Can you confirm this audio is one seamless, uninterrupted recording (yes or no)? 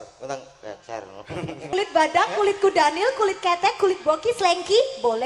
no